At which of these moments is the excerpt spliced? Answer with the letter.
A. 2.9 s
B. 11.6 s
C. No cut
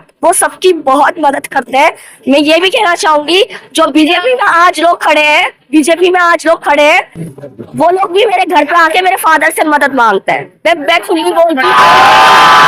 B